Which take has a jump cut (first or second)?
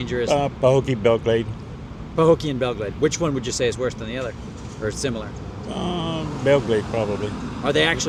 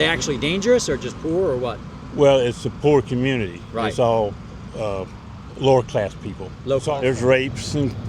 second